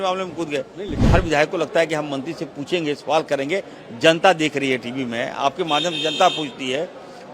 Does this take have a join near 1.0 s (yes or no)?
yes